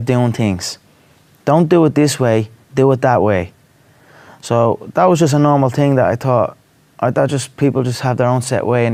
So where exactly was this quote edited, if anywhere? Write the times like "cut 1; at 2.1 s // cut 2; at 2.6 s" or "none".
none